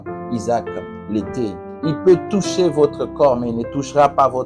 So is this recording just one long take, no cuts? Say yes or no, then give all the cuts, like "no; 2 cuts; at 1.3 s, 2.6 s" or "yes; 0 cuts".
no; 1 cut; at 1.7 s